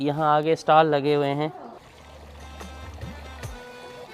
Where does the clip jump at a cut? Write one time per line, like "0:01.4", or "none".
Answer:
none